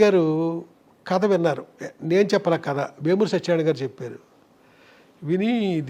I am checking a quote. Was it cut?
no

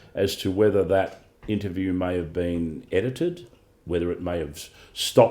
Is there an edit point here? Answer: no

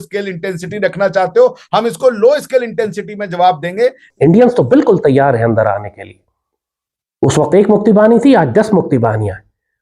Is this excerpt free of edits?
no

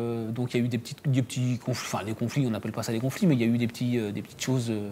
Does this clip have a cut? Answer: no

